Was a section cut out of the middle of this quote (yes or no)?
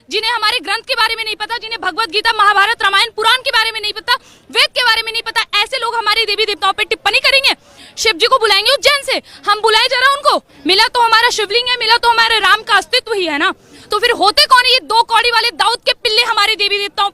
yes